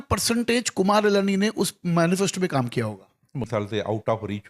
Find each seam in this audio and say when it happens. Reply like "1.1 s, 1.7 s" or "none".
3.5 s